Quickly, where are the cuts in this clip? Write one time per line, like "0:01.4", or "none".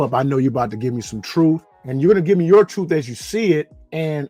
none